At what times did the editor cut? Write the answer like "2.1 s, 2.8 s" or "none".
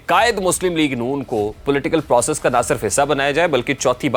1.6 s